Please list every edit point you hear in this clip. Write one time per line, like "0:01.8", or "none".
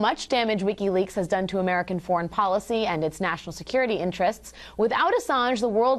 0:01.8